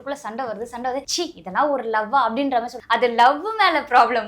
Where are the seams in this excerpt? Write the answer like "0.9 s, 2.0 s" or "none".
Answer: 1.1 s, 2.8 s